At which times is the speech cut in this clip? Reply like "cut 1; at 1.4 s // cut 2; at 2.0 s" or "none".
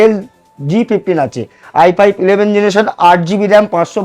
none

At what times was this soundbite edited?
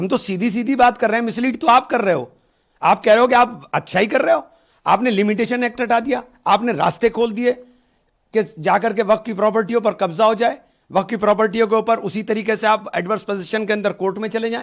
none

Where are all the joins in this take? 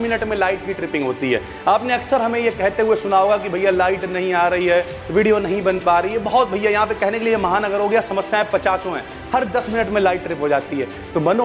none

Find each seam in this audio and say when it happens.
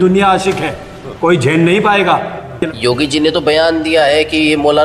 cut 1; at 2.7 s

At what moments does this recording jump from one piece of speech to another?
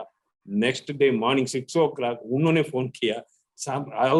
none

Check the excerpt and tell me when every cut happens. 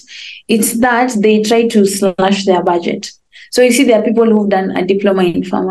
none

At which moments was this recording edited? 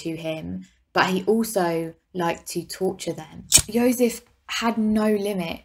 cut 1; at 3.4 s

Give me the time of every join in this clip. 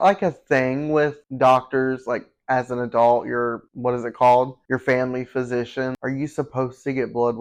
none

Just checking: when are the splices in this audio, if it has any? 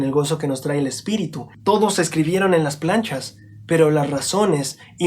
cut 1; at 1.4 s

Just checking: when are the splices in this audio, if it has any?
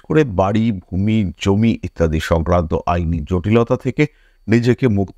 none

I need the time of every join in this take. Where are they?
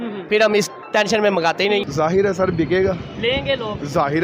cut 1; at 1.8 s

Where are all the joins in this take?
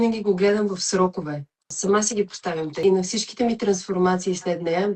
cut 1; at 1.7 s // cut 2; at 2.8 s

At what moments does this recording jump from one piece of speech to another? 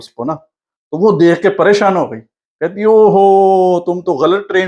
none

